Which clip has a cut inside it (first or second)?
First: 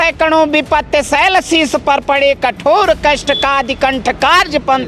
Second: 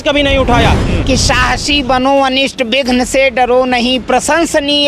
second